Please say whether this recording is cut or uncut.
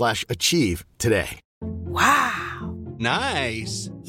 uncut